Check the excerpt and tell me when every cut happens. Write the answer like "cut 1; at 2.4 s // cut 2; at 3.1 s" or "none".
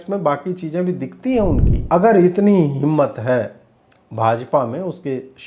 cut 1; at 1.7 s